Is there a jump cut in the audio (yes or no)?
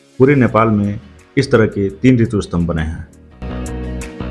no